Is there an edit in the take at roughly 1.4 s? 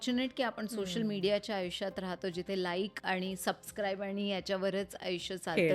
no; 1 cut; at 3.0 s

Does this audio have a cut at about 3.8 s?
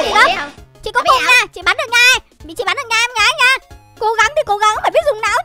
yes; 1 cut; at 3.8 s

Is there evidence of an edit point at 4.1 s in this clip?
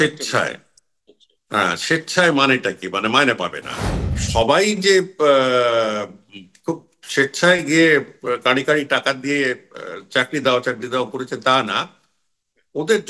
yes; 1 cut; at 4.1 s

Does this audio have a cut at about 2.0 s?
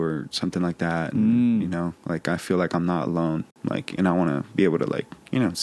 no; 1 cut; at 3.5 s

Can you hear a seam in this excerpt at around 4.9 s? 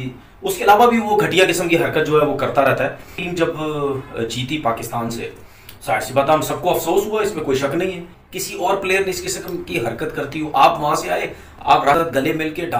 no; 1 cut; at 3.3 s

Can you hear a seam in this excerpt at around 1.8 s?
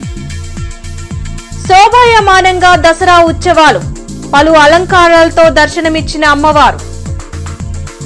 no; 0 cuts

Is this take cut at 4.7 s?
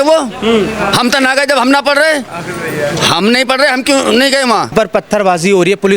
yes; 1 cut; at 4.7 s

